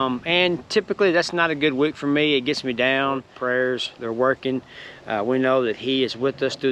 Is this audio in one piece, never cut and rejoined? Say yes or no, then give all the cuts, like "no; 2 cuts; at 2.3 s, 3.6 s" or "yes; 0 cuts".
no; 1 cut; at 3.3 s